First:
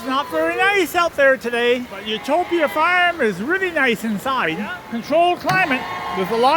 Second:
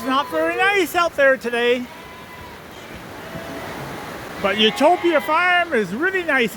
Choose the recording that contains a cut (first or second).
first